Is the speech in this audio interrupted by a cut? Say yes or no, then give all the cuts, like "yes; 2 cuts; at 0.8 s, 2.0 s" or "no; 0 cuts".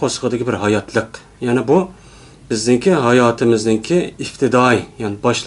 yes; 1 cut; at 4.0 s